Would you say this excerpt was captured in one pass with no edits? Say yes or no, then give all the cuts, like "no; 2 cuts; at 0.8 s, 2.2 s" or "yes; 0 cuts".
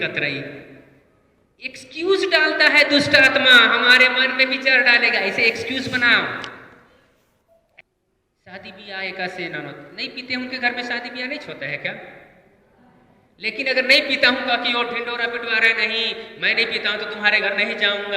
no; 1 cut; at 7.7 s